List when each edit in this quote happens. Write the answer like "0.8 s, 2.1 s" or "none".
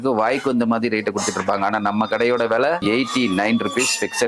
2.8 s